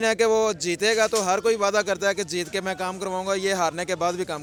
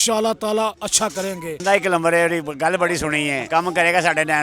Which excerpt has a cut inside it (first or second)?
second